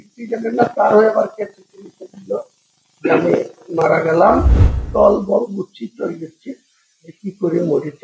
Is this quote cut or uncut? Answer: cut